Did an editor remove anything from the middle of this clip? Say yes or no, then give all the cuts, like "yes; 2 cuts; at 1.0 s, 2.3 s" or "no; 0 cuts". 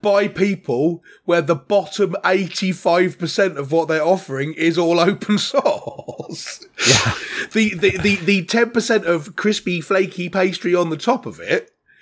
no; 0 cuts